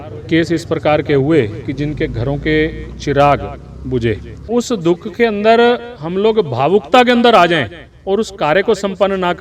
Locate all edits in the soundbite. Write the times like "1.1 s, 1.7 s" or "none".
4.4 s